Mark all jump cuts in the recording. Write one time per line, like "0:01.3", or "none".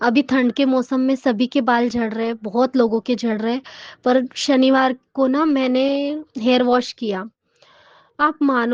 none